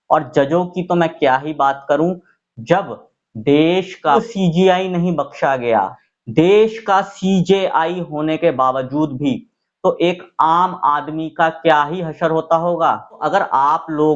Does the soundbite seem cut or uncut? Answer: cut